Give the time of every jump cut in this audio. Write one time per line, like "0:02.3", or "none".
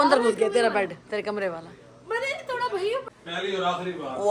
0:03.1

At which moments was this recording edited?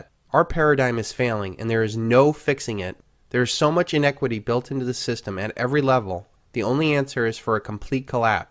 none

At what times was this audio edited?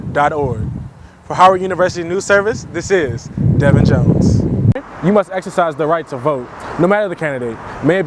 0:04.9

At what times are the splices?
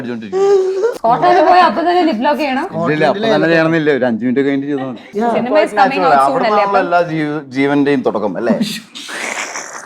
0:01.0
0:05.1

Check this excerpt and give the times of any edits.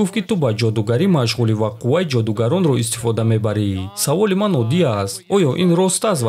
none

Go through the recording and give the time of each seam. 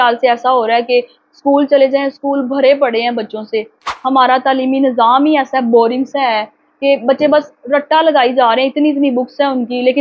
none

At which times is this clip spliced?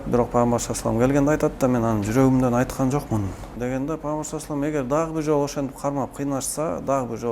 0:03.5

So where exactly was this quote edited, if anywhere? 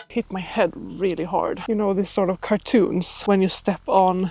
0:01.6
0:03.1

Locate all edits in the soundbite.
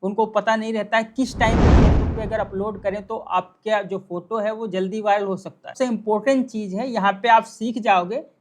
0:05.7

